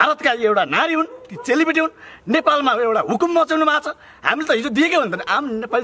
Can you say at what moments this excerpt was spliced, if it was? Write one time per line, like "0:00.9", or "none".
none